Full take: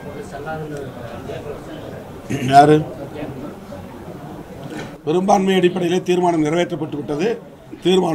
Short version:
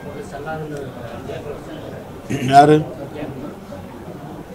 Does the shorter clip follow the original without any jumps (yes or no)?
yes